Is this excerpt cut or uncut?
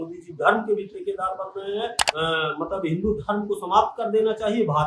cut